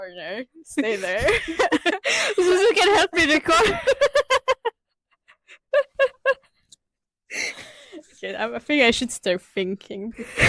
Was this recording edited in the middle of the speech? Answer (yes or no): no